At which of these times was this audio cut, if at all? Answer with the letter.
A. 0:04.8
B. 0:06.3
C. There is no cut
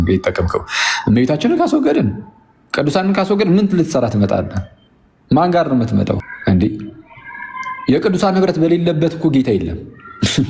B